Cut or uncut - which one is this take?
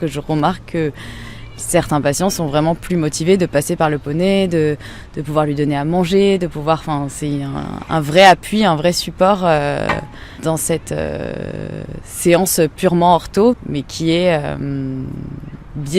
cut